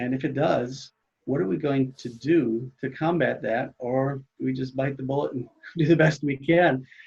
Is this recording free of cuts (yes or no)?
yes